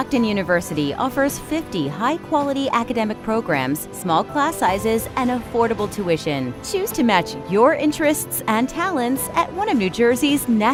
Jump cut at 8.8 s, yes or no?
no